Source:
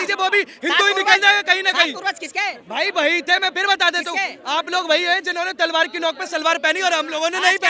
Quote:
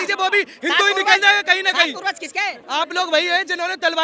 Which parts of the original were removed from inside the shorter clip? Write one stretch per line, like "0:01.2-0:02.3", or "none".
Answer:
0:02.6-0:04.4